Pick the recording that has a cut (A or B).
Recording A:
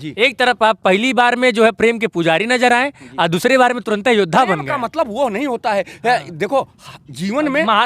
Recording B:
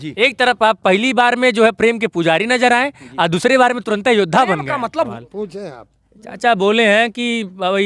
B